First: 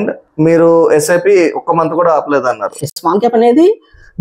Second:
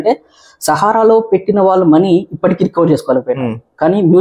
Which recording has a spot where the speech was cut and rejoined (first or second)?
first